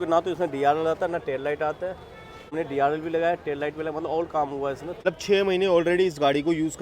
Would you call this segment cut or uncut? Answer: cut